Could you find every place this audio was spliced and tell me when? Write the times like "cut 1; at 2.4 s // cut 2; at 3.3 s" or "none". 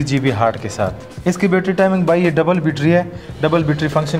cut 1; at 1.1 s